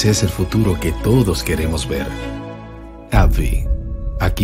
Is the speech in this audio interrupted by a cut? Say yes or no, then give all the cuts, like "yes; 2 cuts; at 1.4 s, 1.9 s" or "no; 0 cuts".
no; 0 cuts